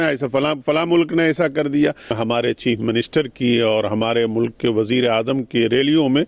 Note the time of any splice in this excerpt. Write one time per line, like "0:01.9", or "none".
0:02.2